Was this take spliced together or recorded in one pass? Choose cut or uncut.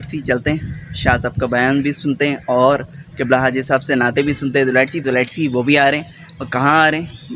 cut